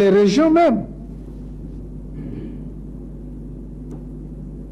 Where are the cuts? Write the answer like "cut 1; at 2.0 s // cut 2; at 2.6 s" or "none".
none